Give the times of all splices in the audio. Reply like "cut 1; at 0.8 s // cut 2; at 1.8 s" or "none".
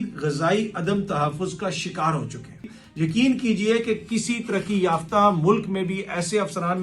cut 1; at 2.8 s